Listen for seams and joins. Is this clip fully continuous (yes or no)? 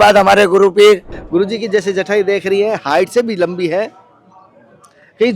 no